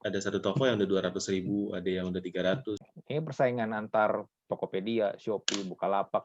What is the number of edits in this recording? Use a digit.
1